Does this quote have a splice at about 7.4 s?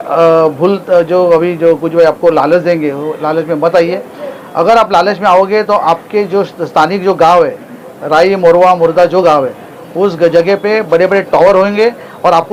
no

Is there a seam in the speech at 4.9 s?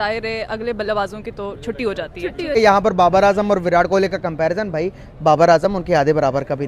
no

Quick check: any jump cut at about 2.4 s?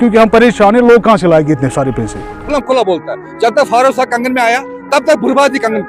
yes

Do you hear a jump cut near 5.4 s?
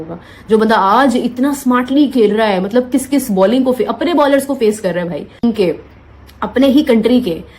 yes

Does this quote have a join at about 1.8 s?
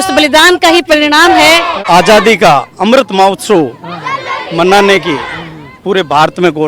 yes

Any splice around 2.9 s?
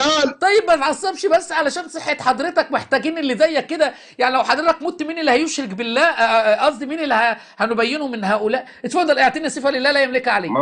no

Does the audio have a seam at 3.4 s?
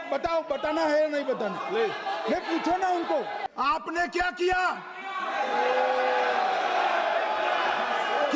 yes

